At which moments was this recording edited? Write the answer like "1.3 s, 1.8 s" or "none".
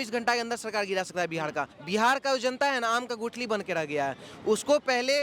1.8 s